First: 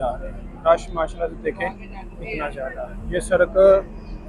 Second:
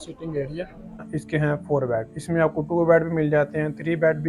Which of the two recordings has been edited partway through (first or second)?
second